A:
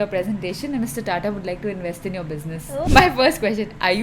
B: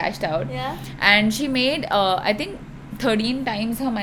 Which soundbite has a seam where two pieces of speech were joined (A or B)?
A